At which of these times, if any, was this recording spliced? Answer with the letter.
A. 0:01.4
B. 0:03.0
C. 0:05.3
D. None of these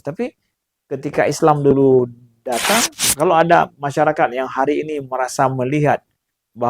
B